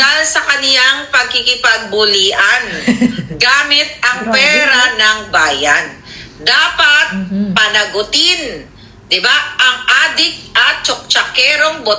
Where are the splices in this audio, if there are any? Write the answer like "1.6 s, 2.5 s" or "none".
5.8 s